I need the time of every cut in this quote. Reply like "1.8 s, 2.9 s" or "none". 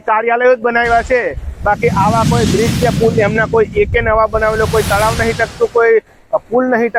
none